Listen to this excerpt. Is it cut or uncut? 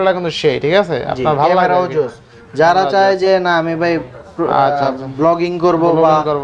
uncut